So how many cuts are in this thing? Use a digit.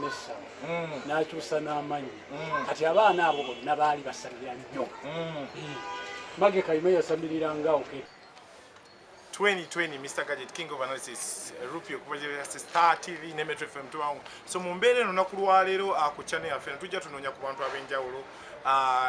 1